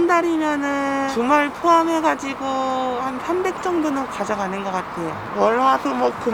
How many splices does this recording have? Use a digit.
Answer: 1